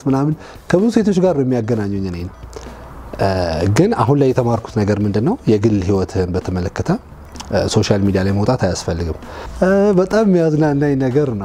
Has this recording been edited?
no; 0 cuts

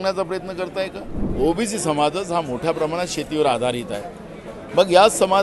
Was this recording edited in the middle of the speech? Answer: yes; 1 cut; at 1.2 s

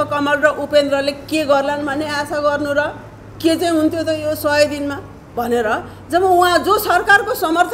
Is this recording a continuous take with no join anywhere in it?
yes; 0 cuts

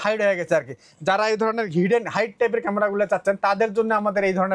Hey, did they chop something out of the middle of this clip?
no; 0 cuts

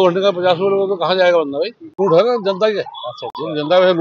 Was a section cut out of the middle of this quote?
yes; 1 cut; at 2.0 s

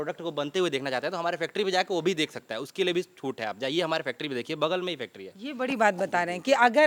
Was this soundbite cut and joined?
no; 0 cuts

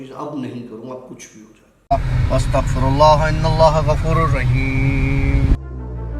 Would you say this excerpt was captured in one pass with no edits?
no; 1 cut; at 1.8 s

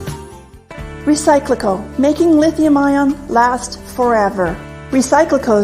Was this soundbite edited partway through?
yes; 2 cuts; at 0.9 s, 3.6 s

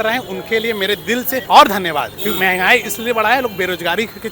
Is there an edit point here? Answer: yes; 2 cuts; at 1.4 s, 2.1 s

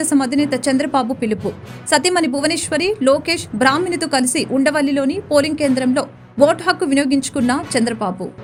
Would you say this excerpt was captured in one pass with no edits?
yes; 0 cuts

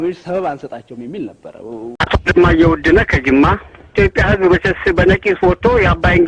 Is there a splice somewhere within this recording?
yes; 1 cut; at 1.9 s

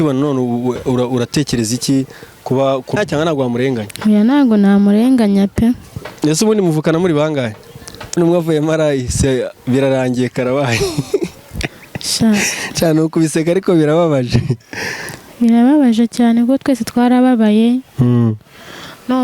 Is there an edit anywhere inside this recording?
yes; 2 cuts; at 3.0 s, 8.2 s

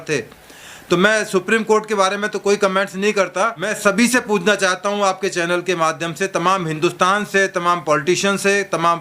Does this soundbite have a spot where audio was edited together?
yes; 1 cut; at 3.7 s

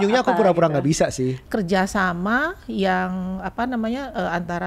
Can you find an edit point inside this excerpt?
yes; 1 cut; at 1.4 s

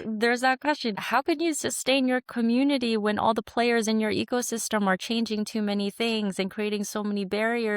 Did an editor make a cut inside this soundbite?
yes; 1 cut; at 1.0 s

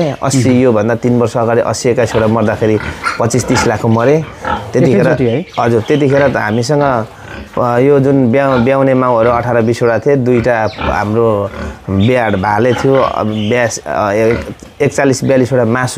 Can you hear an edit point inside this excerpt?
no; 0 cuts

